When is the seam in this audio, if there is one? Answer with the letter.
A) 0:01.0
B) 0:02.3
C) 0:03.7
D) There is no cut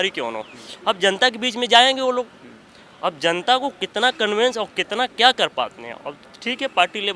D